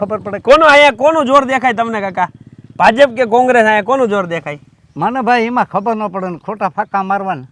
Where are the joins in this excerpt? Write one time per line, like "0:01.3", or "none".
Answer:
none